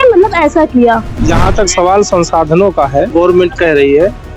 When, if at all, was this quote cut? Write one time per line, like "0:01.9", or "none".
0:01.2
0:03.1